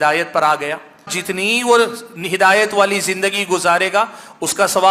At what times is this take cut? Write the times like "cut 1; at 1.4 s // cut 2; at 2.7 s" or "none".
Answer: cut 1; at 1.2 s